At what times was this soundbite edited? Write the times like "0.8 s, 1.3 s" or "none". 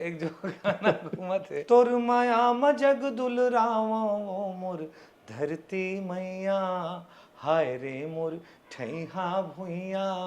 1.6 s